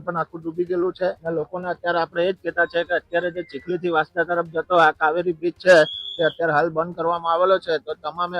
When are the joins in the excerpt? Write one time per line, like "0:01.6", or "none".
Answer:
0:01.2